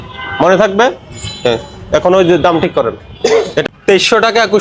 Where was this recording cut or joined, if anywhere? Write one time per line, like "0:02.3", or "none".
0:03.6

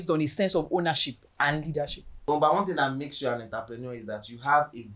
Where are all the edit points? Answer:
0:02.1

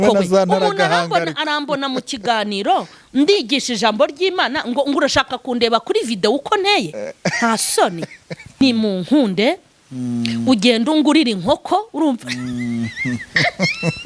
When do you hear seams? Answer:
0:08.6

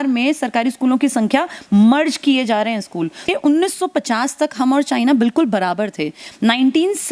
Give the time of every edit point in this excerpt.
0:03.2

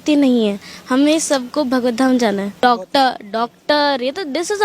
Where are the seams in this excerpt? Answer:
0:02.5

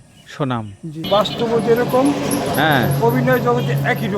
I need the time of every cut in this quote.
0:01.1

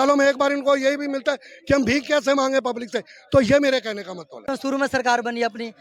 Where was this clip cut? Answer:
0:04.5

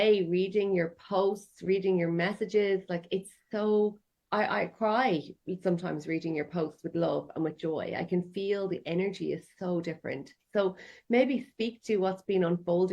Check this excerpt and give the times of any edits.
0:04.2

